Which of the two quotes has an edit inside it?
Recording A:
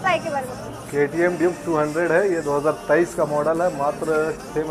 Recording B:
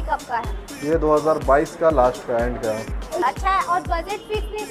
B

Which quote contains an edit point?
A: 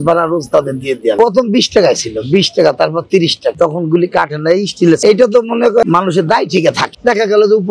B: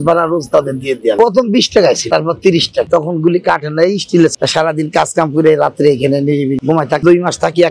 B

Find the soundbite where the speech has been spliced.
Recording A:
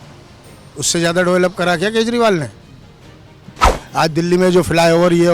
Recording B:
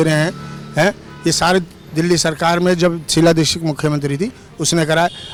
A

